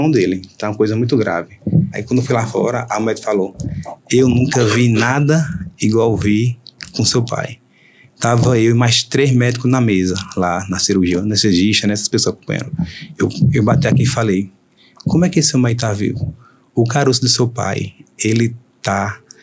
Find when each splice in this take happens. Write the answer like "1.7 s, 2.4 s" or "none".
2.0 s